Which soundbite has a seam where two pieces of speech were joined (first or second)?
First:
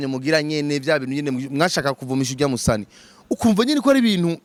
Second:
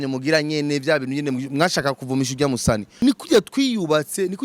second